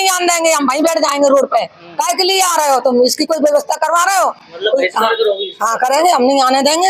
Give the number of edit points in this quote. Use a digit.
0